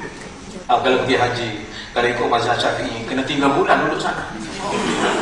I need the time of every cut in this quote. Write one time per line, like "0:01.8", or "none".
none

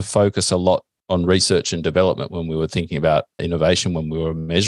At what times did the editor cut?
0:00.9
0:03.4

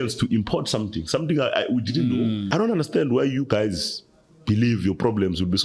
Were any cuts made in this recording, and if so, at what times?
0:02.4

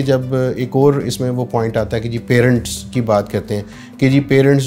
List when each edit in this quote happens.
none

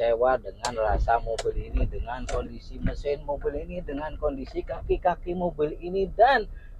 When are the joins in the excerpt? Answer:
none

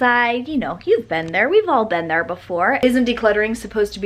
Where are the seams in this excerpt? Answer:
0:02.8

